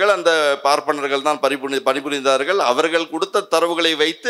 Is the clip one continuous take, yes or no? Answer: yes